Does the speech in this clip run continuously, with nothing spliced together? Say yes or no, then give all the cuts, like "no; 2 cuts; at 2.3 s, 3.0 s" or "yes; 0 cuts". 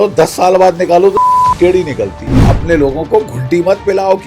no; 1 cut; at 2.5 s